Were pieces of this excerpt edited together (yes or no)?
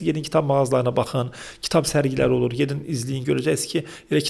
no